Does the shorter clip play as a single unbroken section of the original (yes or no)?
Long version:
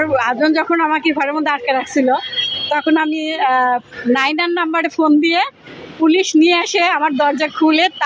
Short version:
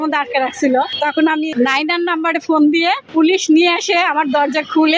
no